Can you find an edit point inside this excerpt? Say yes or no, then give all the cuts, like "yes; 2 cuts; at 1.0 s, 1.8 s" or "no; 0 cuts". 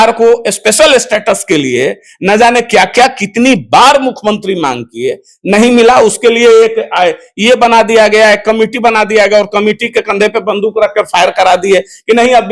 no; 0 cuts